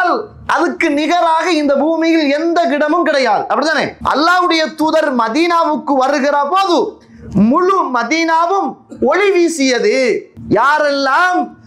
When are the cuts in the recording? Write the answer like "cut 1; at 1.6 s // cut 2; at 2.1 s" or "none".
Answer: cut 1; at 4.0 s // cut 2; at 10.3 s

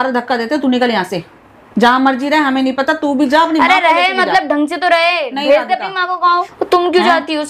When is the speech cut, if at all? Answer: cut 1; at 6.5 s

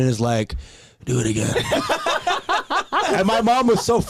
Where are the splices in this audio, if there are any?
cut 1; at 3.1 s

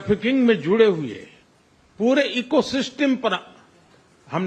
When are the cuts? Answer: none

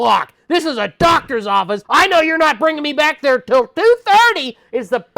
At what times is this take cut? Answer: cut 1; at 1.8 s

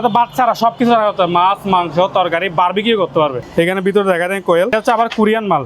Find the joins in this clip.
cut 1; at 3.4 s // cut 2; at 4.7 s

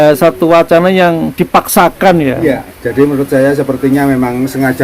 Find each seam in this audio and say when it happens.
cut 1; at 2.7 s

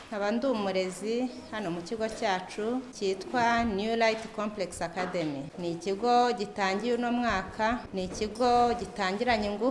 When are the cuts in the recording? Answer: cut 1; at 2.9 s // cut 2; at 5.5 s // cut 3; at 7.9 s

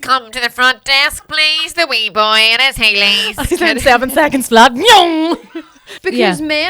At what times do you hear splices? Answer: cut 1; at 5.3 s

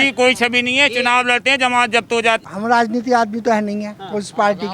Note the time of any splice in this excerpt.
cut 1; at 2.4 s

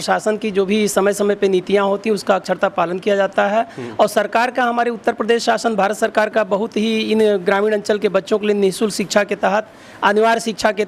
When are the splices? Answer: none

